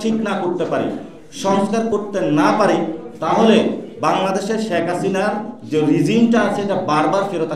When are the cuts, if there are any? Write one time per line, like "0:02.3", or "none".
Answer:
none